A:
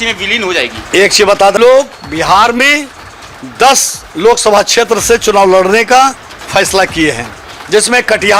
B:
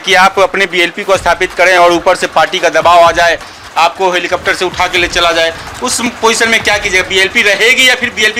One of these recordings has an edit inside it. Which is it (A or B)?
A